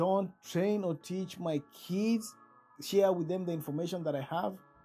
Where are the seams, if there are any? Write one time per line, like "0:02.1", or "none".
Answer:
0:02.8